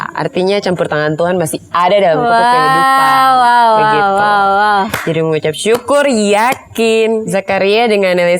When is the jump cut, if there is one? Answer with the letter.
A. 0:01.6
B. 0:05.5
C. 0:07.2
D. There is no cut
C